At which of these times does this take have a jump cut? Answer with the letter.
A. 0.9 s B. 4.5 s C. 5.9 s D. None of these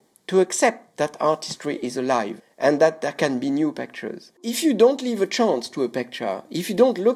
B